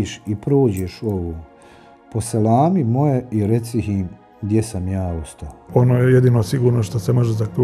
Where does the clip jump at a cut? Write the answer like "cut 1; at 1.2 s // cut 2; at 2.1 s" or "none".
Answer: cut 1; at 5.7 s